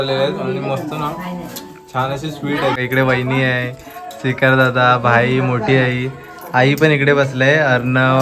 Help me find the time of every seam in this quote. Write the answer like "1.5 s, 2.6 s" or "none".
2.8 s